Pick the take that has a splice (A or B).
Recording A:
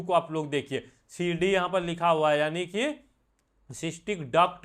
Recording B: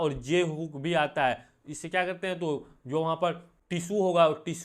B